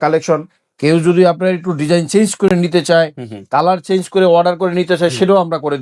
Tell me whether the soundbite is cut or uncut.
uncut